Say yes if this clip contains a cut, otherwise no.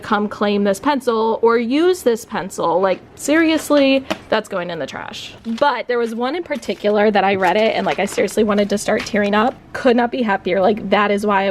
yes